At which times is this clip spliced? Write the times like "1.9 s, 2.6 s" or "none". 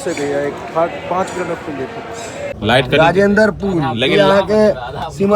2.5 s